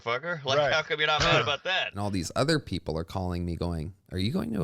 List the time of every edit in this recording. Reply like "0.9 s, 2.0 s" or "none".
1.8 s